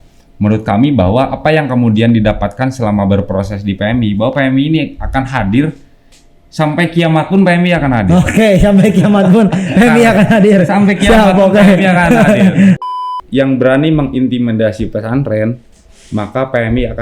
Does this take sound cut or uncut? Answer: cut